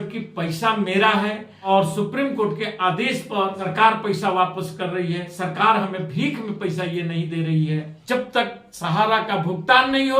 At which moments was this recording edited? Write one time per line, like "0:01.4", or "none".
0:01.5
0:03.6
0:07.9